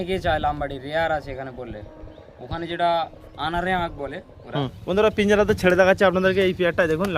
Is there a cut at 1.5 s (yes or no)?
no